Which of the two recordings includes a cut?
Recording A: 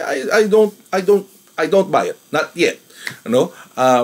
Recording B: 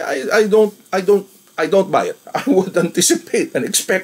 B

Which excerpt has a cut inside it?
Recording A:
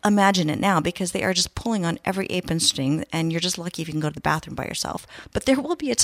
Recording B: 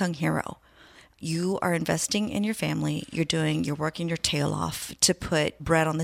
A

